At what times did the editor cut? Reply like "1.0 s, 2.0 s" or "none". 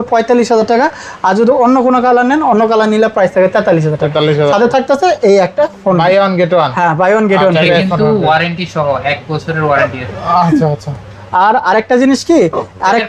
none